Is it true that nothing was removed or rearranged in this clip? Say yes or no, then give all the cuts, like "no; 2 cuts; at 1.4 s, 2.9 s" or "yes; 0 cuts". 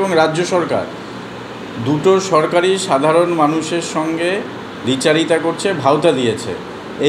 yes; 0 cuts